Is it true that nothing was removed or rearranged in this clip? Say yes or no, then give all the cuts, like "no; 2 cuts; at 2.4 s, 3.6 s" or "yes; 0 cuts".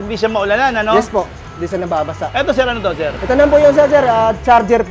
no; 1 cut; at 3.2 s